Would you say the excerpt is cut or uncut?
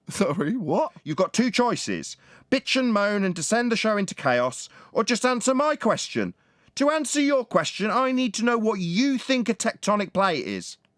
cut